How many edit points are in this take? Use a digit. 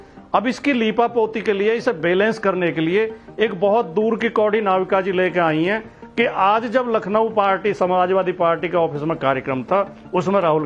0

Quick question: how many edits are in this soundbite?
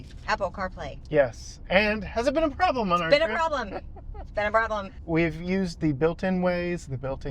1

